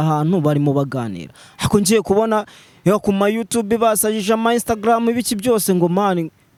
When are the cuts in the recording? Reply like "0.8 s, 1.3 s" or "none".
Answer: none